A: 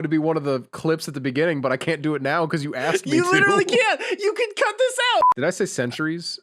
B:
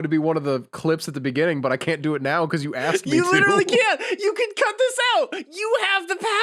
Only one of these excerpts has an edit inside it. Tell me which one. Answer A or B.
A